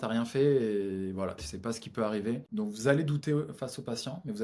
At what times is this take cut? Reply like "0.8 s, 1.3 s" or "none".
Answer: 2.5 s